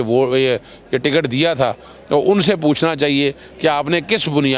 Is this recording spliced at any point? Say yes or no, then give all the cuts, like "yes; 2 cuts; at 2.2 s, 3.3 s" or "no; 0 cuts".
no; 0 cuts